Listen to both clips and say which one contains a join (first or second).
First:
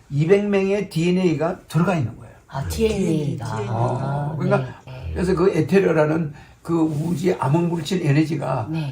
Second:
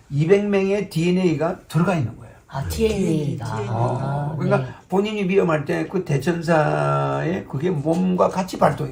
first